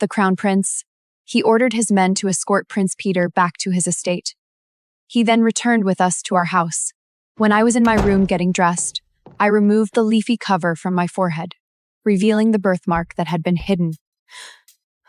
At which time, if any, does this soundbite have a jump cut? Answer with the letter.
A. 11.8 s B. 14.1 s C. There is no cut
B